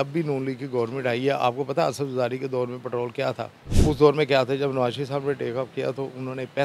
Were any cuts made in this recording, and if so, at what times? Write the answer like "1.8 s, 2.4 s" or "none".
3.6 s